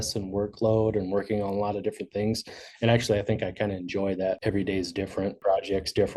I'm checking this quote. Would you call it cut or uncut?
cut